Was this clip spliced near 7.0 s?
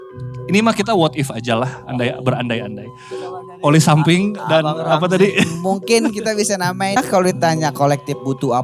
yes; 1 cut; at 7.0 s

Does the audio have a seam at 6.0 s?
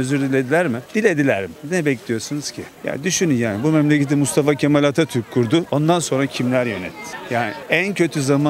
no; 1 cut; at 2.6 s

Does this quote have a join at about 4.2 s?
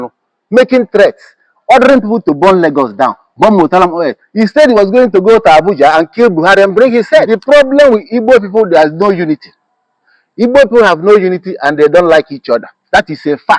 no; 1 cut; at 7.3 s

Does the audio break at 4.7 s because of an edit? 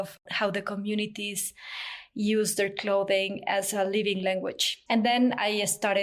yes; 1 cut; at 4.7 s

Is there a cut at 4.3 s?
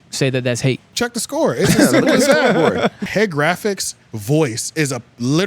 no; 2 cuts; at 0.9 s, 3.0 s

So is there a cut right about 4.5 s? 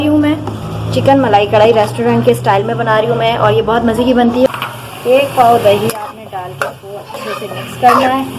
yes; 1 cut; at 4.5 s

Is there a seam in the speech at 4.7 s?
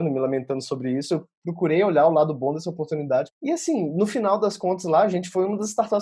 no; 2 cuts; at 1.4 s, 3.3 s

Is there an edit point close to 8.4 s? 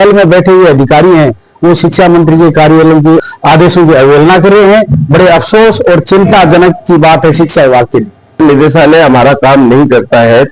yes; 2 cuts; at 3.2 s, 8.4 s

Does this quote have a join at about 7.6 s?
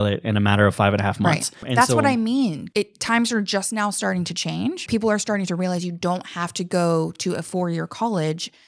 no; 3 cuts; at 1.6 s, 2.6 s, 4.8 s

